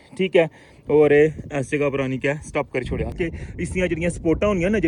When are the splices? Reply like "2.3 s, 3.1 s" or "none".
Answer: 3.1 s